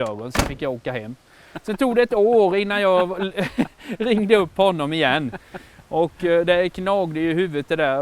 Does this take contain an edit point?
no; 0 cuts

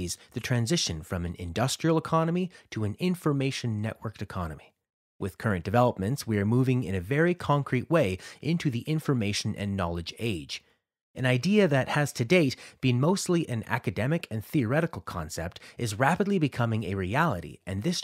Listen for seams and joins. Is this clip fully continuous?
yes; 0 cuts

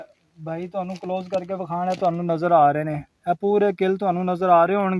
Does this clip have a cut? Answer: no; 0 cuts

